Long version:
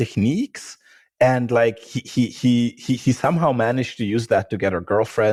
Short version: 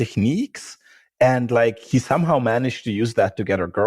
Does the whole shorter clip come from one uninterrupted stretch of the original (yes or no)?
no